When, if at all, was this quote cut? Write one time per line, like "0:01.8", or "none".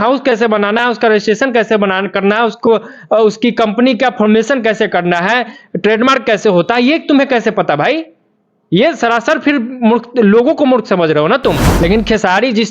0:11.7